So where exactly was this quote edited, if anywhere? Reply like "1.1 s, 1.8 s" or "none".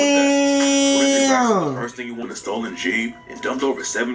2.2 s